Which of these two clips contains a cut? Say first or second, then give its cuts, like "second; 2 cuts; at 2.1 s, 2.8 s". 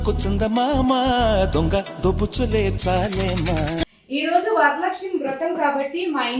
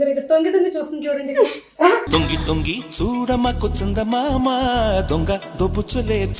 first; 1 cut; at 3.9 s